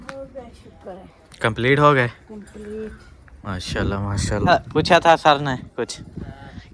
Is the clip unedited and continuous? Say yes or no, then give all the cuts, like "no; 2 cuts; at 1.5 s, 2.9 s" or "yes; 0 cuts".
no; 1 cut; at 4.5 s